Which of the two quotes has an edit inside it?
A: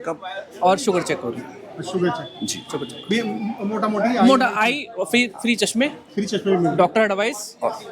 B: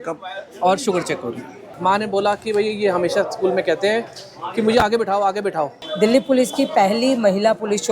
B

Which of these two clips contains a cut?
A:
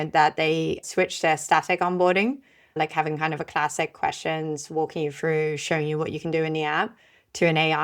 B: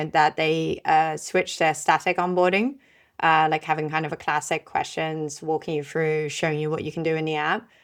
A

